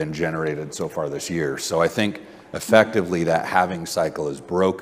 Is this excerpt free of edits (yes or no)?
yes